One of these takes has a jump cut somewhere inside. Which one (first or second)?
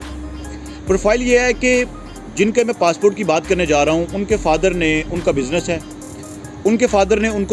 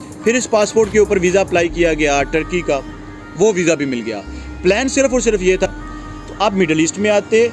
second